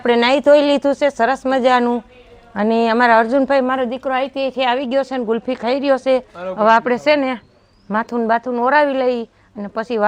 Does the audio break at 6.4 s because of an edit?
no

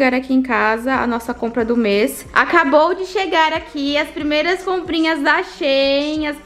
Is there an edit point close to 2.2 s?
yes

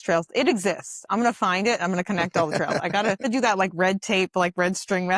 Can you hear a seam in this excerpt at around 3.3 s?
yes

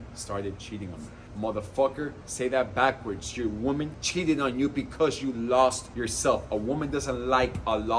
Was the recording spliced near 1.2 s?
yes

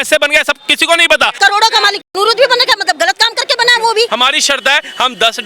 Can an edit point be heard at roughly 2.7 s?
no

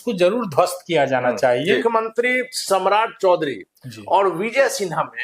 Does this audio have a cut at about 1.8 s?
yes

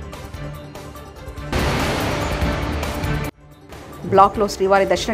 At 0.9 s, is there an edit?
yes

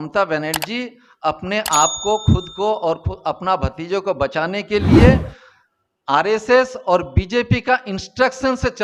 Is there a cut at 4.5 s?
no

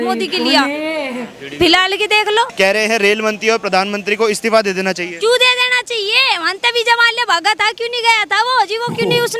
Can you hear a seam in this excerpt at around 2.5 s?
yes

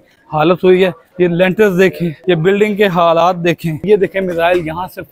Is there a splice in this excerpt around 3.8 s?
yes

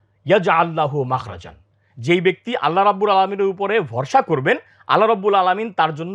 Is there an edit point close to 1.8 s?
no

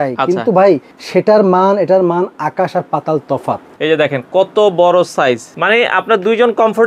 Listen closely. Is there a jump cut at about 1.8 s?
no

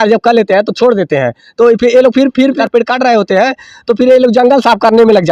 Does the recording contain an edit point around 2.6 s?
yes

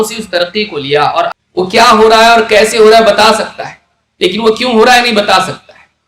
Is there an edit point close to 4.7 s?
no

